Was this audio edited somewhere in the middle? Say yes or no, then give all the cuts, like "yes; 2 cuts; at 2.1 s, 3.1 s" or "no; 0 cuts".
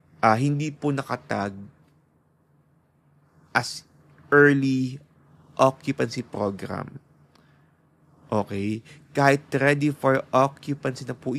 no; 0 cuts